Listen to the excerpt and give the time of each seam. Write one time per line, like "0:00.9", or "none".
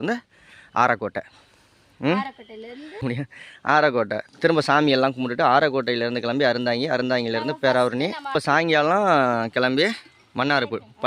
0:03.0
0:08.3